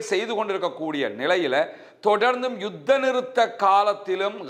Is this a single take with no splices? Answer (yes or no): yes